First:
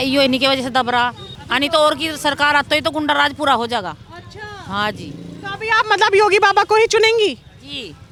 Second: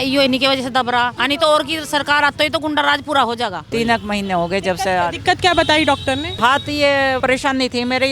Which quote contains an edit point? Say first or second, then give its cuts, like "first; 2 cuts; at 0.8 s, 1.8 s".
second; 4 cuts; at 1.2 s, 3.6 s, 6.3 s, 7.2 s